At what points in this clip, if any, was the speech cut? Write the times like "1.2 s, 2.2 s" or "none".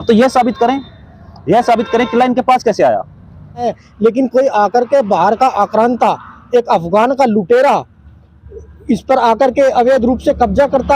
3.8 s